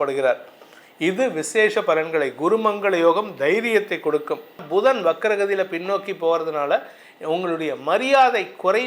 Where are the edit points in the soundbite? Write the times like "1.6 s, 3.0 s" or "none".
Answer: 4.6 s